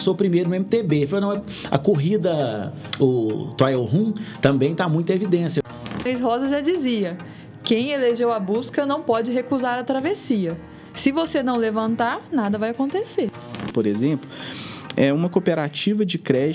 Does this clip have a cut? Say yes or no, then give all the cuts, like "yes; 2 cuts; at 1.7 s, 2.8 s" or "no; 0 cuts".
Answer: yes; 2 cuts; at 5.9 s, 13.6 s